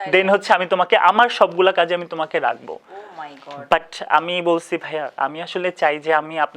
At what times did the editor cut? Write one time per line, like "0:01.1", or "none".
none